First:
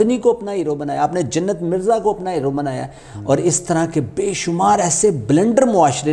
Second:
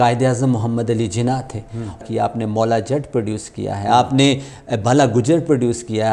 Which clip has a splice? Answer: second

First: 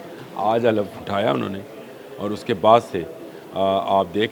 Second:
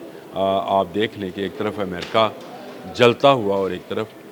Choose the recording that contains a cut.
first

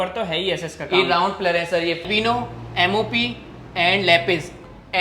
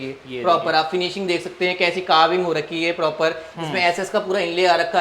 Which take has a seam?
first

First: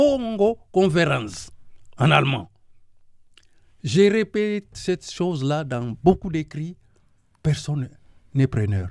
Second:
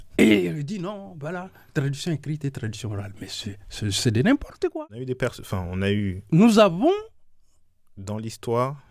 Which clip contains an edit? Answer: second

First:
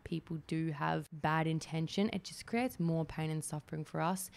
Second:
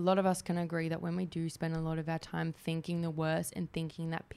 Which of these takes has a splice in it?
first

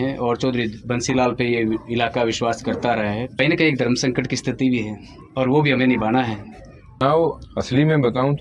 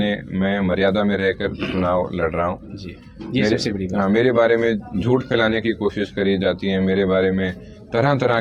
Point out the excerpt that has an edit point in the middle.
first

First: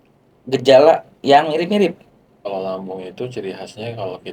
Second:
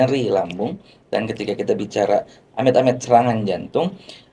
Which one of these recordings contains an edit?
first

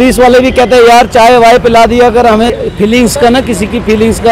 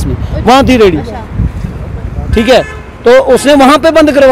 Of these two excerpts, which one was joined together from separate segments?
first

